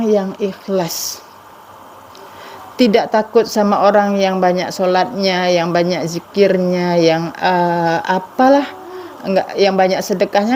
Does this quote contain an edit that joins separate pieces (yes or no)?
no